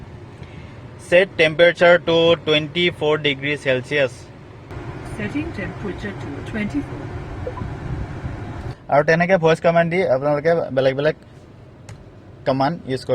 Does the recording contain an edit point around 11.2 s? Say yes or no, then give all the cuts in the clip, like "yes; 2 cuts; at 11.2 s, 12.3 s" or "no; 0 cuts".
no; 2 cuts; at 4.7 s, 8.8 s